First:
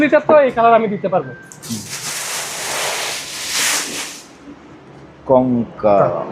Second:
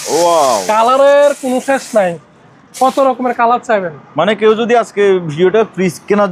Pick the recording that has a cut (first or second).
first